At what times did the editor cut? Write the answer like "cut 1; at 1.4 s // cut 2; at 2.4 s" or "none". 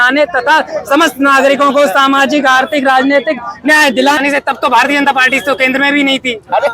cut 1; at 4.2 s